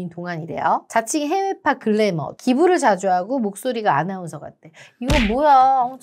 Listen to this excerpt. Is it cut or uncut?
cut